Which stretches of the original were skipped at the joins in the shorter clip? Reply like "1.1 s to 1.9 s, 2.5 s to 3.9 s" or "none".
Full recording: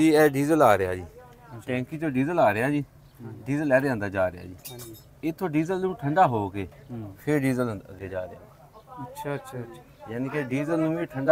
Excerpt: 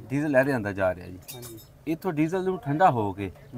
none